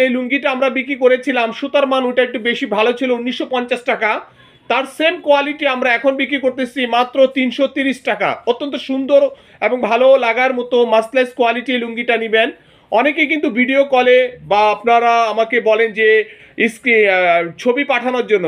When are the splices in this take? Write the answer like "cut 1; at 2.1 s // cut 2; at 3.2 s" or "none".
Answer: none